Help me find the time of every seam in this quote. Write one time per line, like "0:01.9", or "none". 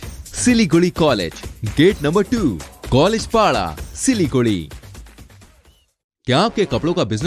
none